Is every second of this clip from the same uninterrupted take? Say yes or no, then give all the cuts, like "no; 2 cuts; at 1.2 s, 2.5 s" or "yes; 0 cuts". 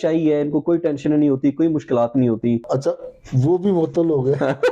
no; 1 cut; at 2.6 s